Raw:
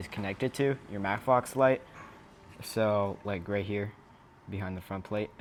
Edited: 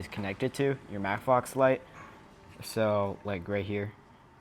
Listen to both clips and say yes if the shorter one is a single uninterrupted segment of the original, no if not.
yes